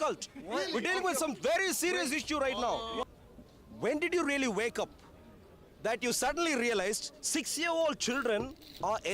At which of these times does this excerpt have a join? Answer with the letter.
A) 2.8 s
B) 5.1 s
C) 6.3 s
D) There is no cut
A